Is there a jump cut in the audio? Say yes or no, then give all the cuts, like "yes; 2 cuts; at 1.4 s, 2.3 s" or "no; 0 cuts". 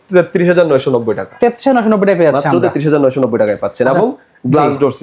no; 0 cuts